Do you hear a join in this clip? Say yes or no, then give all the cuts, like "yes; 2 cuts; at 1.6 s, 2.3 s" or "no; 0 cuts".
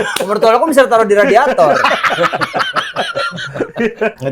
no; 0 cuts